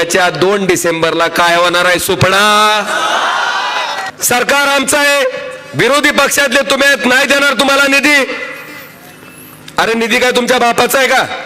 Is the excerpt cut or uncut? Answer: cut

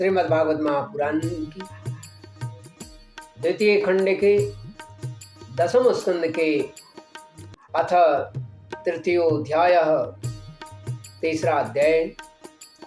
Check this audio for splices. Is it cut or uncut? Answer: cut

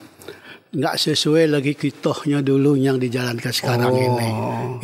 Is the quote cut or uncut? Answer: uncut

